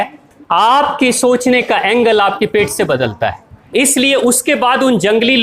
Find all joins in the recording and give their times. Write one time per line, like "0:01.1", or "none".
0:03.7